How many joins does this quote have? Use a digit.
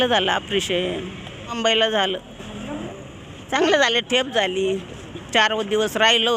2